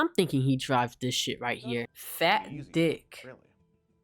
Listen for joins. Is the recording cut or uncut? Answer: cut